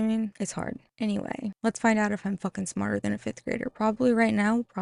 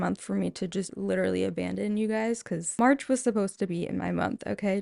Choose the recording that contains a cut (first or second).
second